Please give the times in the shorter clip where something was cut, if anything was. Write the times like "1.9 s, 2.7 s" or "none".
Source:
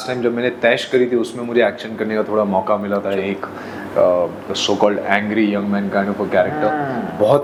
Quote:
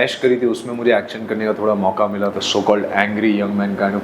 2.3 s